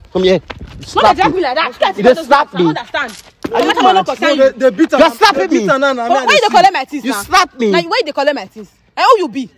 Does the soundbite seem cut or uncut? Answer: uncut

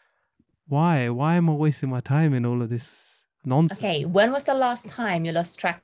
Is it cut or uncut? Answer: cut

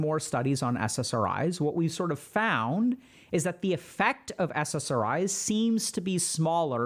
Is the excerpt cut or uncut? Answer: uncut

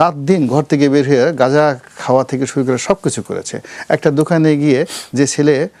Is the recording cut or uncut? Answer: uncut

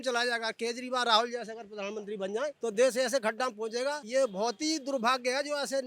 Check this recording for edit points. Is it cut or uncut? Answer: cut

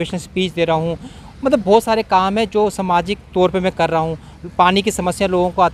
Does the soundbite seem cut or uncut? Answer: uncut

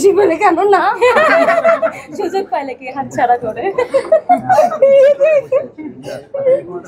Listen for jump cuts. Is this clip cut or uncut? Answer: uncut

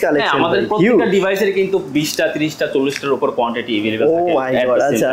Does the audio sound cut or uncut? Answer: uncut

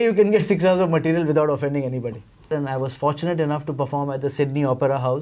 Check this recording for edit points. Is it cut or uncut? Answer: cut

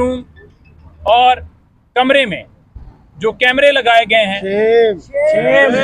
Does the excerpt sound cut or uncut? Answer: uncut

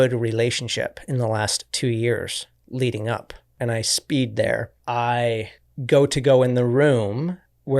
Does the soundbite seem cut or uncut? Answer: cut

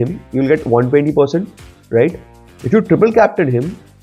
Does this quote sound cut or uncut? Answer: uncut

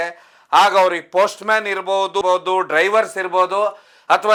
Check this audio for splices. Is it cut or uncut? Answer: uncut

